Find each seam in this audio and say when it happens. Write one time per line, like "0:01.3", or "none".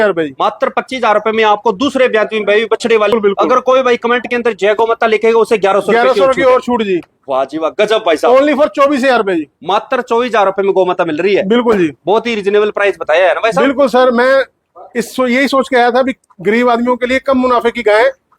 0:03.1